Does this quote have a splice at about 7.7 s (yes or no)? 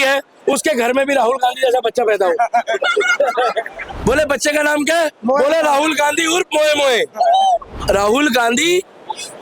yes